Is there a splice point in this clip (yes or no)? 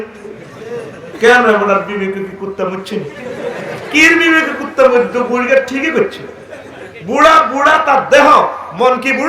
no